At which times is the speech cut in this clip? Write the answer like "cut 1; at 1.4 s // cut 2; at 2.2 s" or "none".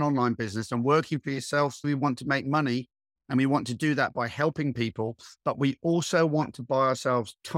cut 1; at 1.9 s